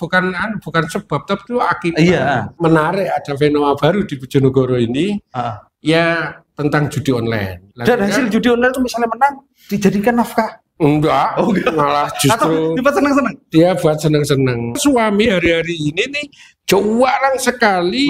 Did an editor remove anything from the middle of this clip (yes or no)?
yes